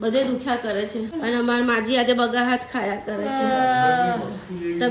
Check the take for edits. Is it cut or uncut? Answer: cut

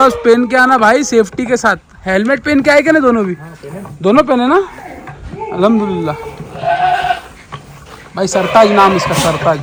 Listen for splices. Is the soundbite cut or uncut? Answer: uncut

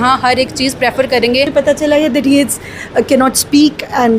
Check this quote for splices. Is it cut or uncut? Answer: cut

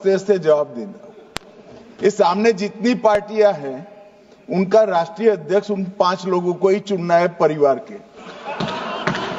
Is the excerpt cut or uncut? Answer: uncut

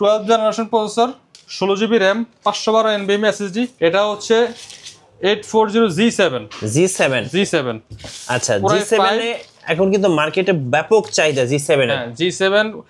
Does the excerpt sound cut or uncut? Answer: cut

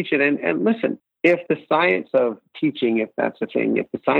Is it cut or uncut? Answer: cut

